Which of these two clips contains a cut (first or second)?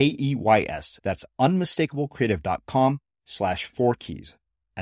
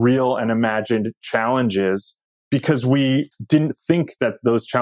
second